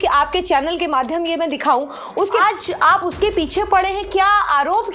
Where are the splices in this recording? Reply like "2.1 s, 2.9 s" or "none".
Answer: 2.4 s

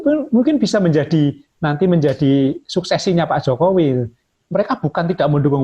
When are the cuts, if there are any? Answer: 4.2 s

